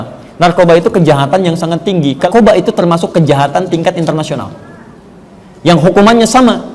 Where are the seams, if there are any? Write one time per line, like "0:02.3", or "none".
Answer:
0:02.3

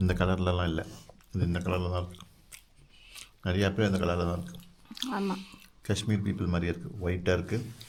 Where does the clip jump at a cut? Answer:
none

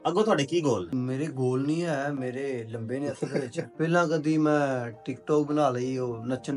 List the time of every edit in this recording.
0:00.9
0:03.6

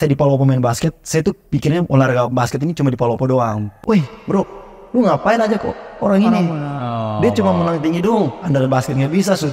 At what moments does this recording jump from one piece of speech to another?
0:03.7

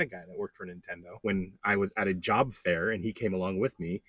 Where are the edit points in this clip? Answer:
0:01.1

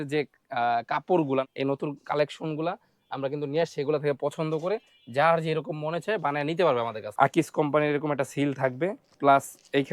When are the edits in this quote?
0:01.4
0:07.0
0:09.1

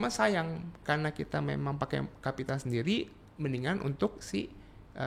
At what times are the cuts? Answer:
none

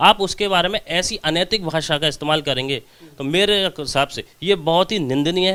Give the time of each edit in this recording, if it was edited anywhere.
none

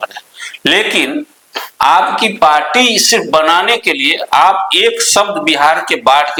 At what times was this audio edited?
none

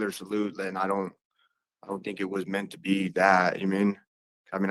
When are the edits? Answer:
none

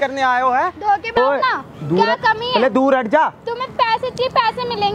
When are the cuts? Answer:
0:01.2

